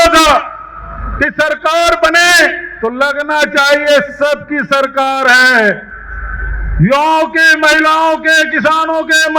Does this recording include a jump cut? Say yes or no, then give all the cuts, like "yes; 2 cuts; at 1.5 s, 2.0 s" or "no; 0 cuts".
no; 0 cuts